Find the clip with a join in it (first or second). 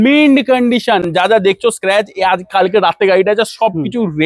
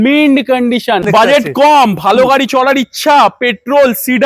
second